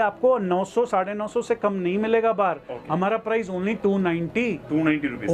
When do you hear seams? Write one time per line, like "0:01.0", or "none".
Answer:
none

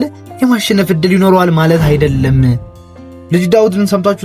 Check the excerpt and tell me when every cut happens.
0:02.7

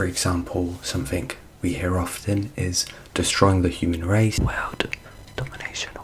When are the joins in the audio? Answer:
0:04.3

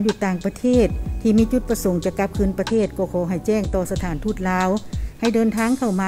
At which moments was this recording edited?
none

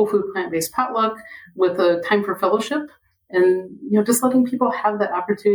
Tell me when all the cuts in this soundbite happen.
none

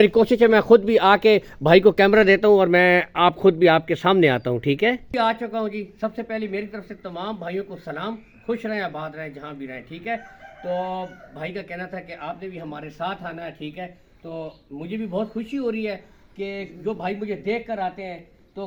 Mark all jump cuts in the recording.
none

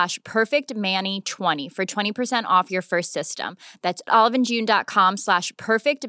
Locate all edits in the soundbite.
0:01.7

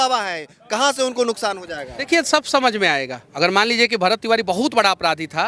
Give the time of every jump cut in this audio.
0:02.1
0:03.2

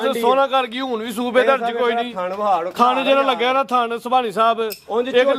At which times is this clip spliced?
none

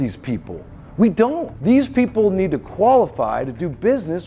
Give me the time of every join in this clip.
0:01.5

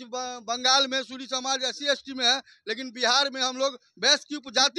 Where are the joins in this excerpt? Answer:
none

